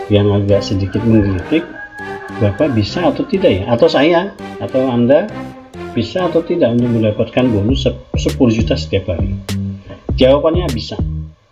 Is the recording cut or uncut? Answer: uncut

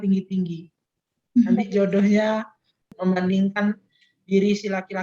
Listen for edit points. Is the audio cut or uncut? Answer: cut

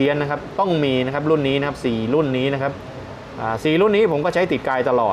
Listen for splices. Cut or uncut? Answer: uncut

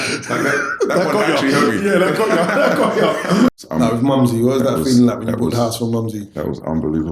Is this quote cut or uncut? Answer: cut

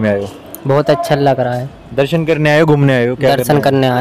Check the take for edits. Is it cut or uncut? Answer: uncut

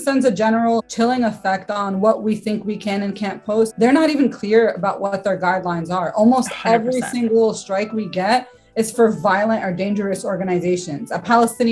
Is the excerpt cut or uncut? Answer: cut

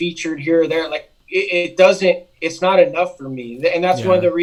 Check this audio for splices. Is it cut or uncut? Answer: uncut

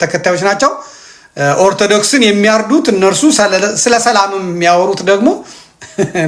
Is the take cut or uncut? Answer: uncut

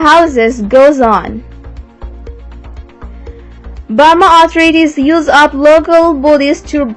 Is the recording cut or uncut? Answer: cut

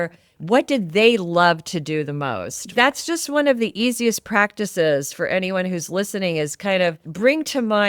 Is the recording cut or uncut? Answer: cut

